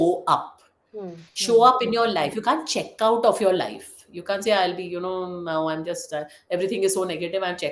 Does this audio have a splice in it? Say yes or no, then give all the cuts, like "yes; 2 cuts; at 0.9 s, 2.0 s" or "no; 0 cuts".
no; 0 cuts